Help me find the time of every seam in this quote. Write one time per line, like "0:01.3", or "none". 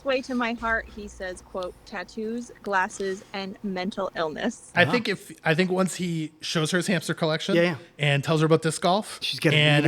0:04.6